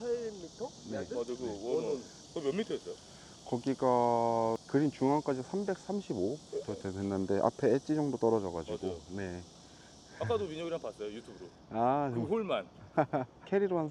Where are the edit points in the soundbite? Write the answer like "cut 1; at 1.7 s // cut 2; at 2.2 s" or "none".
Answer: cut 1; at 2.2 s // cut 2; at 4.6 s // cut 3; at 6.4 s